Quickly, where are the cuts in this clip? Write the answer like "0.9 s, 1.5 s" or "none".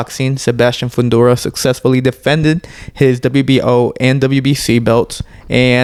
none